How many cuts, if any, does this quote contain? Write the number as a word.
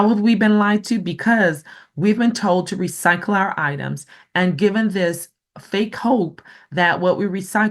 zero